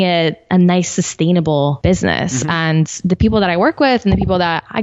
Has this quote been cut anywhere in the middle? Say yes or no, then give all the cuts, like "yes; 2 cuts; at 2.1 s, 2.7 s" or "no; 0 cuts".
yes; 1 cut; at 1.8 s